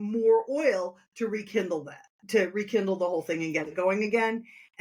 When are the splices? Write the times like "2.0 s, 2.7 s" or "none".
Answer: none